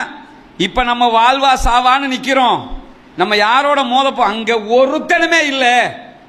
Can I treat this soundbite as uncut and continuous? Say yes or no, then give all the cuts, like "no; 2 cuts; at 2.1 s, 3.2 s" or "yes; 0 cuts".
yes; 0 cuts